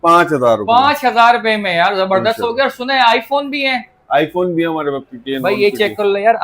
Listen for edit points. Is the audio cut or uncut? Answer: uncut